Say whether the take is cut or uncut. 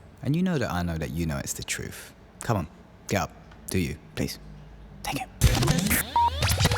uncut